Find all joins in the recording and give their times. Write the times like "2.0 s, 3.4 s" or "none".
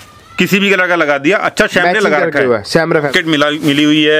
3.1 s

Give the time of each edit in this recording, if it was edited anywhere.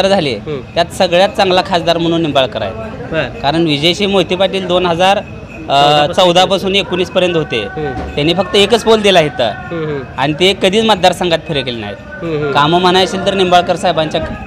none

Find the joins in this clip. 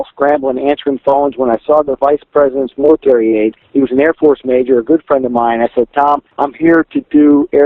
3.6 s, 6.3 s

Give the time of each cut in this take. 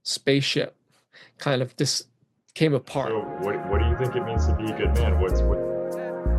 3.1 s

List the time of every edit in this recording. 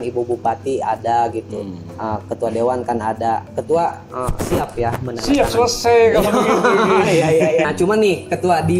7.7 s

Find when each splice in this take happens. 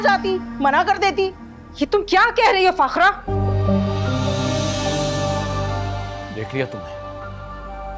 none

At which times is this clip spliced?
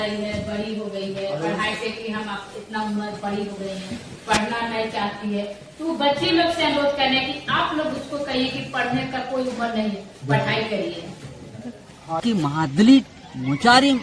12.2 s

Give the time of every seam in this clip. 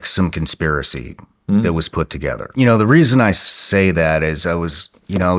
2.5 s

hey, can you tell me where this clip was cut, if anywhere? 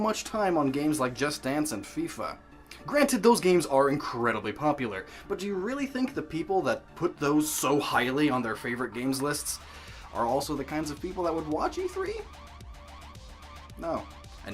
none

